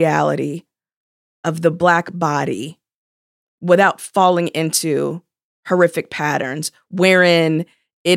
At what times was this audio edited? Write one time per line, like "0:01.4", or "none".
none